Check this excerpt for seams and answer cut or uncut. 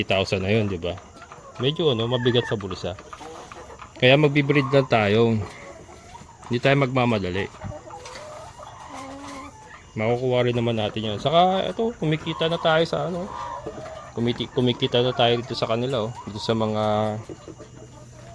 uncut